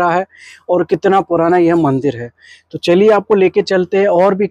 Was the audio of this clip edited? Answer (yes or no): no